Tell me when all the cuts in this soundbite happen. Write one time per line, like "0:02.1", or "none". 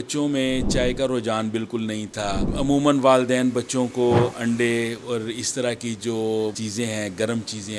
0:02.5
0:06.6